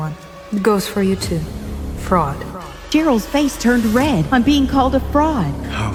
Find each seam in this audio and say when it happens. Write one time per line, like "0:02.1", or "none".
none

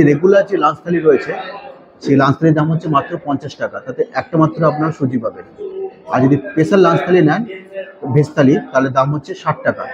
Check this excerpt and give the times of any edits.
none

